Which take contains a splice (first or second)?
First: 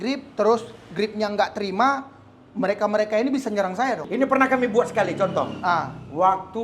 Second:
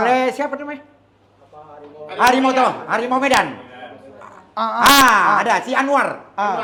first